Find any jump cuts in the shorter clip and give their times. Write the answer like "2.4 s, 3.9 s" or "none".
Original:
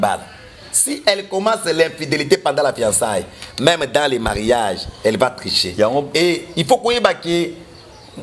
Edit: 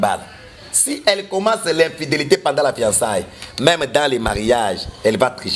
none